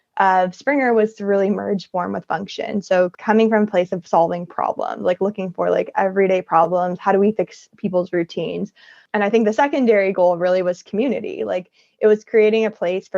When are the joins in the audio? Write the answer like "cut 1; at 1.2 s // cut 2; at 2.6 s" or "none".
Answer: cut 1; at 3.1 s // cut 2; at 9.0 s